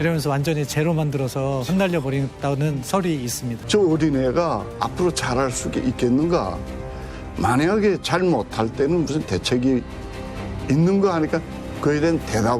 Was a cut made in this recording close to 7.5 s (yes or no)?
no